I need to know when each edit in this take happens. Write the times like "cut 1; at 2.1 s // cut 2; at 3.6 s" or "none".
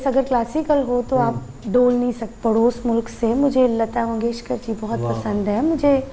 cut 1; at 2.3 s